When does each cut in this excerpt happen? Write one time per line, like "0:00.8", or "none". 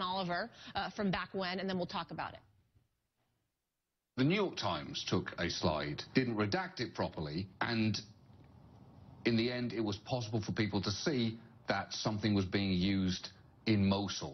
0:12.6